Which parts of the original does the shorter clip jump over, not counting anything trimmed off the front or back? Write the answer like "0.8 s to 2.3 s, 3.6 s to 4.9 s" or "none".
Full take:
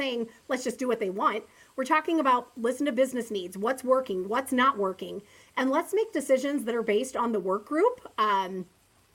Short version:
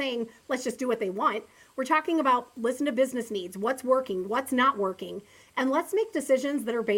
none